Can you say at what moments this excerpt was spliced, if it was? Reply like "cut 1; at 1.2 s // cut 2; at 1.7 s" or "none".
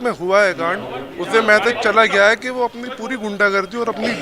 none